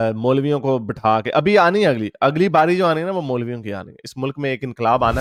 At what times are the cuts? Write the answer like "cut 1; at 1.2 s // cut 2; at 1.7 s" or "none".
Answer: none